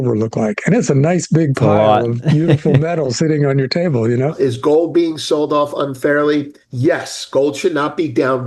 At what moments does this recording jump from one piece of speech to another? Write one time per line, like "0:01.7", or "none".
0:04.3